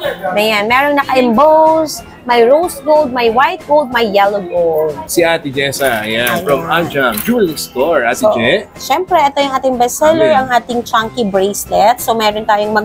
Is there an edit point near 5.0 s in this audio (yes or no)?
yes